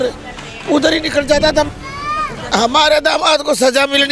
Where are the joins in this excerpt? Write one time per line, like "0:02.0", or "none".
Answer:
0:01.7